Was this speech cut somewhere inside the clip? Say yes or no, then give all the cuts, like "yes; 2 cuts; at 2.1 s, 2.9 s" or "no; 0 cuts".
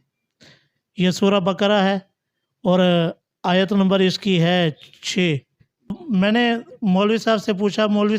yes; 1 cut; at 6.0 s